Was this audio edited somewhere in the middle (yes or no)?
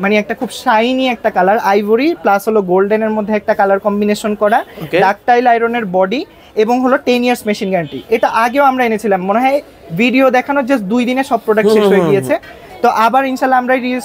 no